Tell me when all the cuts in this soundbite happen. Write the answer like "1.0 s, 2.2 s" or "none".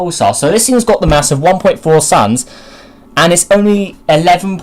2.5 s